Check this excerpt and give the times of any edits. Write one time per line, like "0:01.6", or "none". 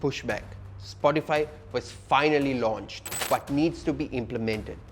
0:03.1